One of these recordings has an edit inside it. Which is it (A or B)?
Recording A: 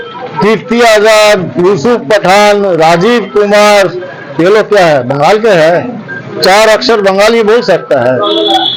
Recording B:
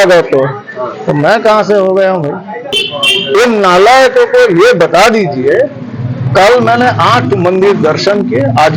B